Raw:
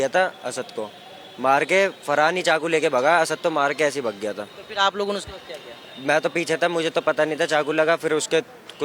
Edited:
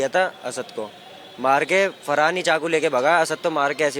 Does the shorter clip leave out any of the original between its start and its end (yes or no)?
no